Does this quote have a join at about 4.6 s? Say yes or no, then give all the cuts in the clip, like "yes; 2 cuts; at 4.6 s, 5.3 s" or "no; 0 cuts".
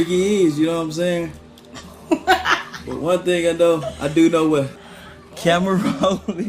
no; 0 cuts